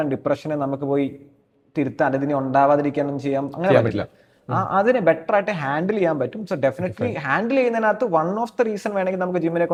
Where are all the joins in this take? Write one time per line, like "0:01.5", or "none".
none